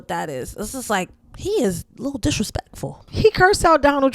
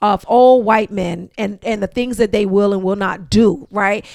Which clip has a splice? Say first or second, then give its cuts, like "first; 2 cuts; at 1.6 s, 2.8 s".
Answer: first; 1 cut; at 3.1 s